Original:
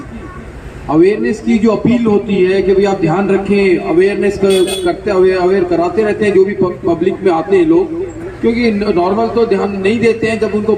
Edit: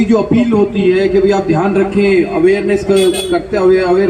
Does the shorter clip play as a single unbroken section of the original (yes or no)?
yes